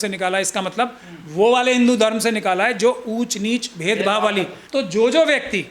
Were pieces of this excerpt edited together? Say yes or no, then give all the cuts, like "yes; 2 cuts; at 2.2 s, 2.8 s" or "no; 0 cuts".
yes; 1 cut; at 4.6 s